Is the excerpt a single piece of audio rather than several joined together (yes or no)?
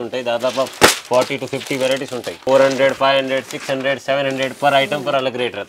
no